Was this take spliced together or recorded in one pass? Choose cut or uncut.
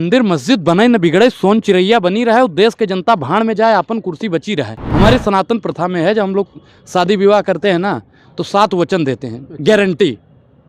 cut